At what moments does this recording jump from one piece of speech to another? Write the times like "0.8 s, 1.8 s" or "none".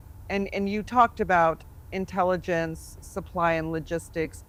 none